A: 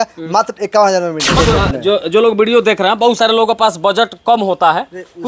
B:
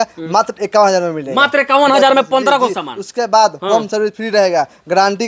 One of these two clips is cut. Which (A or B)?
A